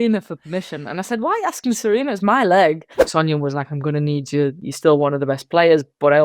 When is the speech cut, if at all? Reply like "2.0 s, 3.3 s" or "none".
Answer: 3.0 s, 4.7 s

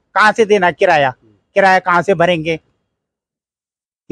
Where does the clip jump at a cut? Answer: none

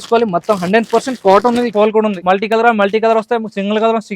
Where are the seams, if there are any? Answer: 1.8 s

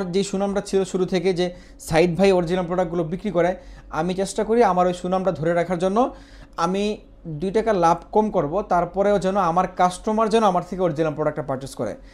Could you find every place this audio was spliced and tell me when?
none

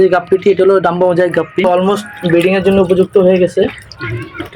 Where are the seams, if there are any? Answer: 1.6 s

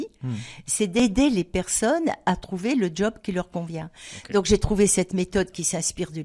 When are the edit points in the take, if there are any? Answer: 1.0 s

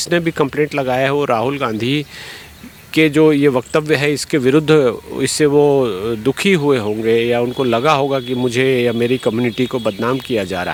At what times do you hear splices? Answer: none

